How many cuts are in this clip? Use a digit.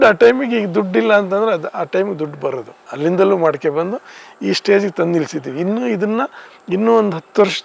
0